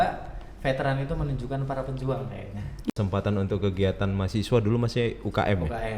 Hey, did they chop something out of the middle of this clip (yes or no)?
yes